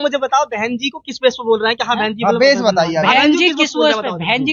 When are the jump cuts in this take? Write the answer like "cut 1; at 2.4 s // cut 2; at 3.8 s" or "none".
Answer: none